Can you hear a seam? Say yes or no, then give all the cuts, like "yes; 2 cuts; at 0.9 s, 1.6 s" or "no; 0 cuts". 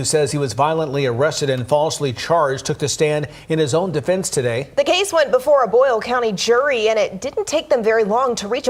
no; 0 cuts